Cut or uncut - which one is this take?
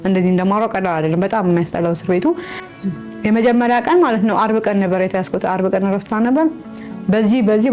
uncut